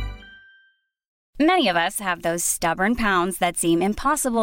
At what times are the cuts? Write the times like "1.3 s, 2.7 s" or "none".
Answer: 1.2 s

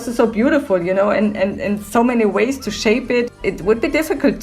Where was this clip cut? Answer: 3.3 s

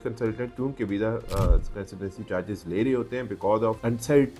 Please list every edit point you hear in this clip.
none

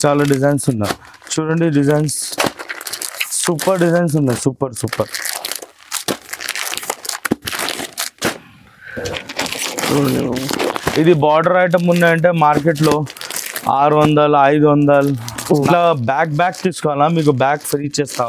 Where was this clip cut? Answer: 15.7 s

